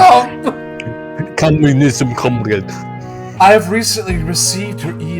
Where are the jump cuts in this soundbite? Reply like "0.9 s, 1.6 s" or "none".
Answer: 3.4 s